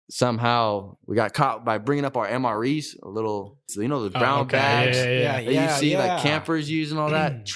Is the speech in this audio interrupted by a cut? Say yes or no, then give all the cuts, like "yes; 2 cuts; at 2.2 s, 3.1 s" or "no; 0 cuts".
yes; 2 cuts; at 0.9 s, 3.7 s